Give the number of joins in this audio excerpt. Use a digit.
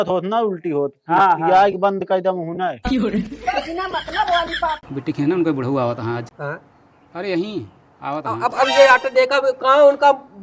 2